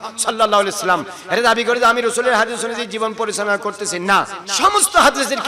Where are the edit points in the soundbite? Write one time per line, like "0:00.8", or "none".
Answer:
0:04.4